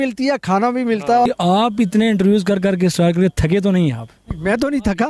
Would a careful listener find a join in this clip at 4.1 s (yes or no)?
no